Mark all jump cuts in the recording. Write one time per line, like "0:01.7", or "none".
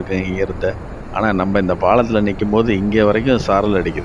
none

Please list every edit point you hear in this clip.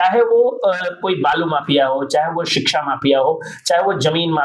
none

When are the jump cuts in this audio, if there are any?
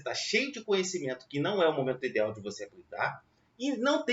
none

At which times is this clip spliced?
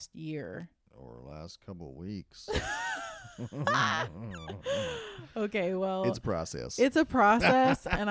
none

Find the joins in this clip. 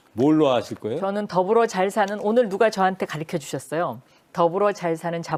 none

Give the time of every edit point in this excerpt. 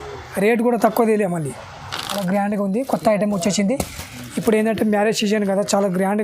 0:02.2

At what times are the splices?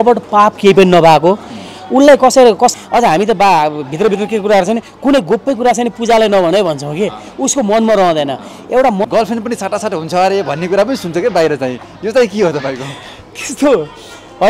0:02.8
0:09.0

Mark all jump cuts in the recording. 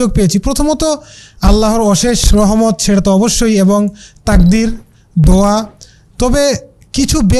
none

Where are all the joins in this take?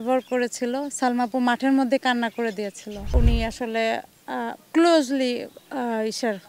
0:03.0

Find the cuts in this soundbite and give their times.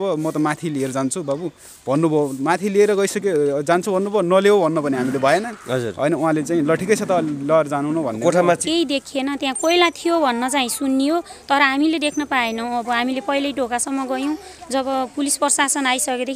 0:08.6

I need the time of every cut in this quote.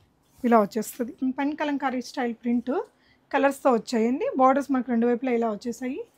0:01.2

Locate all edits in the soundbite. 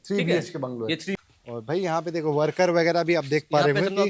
0:01.2

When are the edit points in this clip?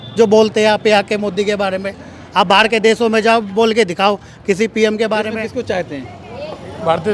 0:05.4

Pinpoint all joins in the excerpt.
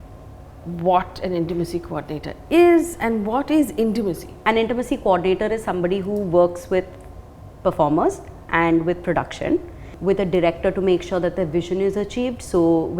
0:04.4
0:09.9

